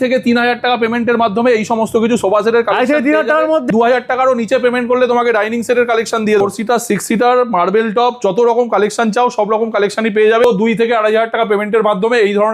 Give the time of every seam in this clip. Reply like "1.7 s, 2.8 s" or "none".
3.7 s, 6.4 s, 10.4 s